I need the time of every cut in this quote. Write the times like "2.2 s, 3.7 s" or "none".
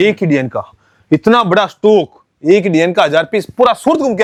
none